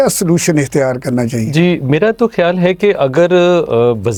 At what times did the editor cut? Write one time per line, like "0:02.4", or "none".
none